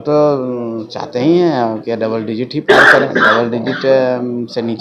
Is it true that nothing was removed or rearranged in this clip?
yes; 0 cuts

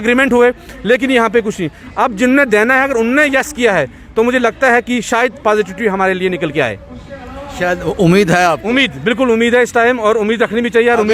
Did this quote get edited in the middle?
no; 0 cuts

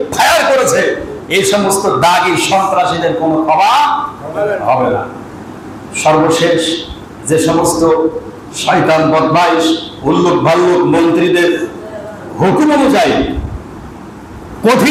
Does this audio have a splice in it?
no; 0 cuts

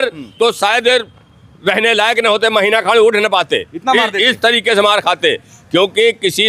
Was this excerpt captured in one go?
yes; 0 cuts

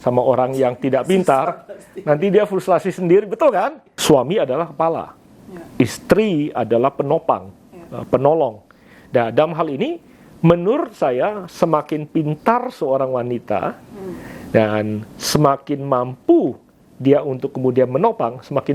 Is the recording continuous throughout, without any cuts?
no; 1 cut; at 3.9 s

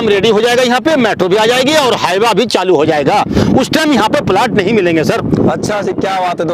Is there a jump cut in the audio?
no; 0 cuts

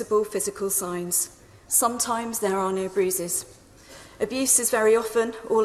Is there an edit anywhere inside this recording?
no; 0 cuts

